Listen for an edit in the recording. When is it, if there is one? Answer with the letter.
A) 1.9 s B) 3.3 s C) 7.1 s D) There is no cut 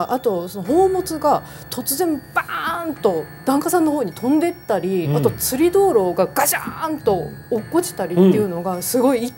B